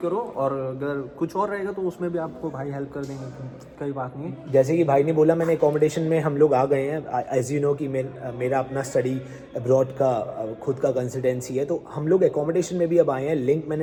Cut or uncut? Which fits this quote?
uncut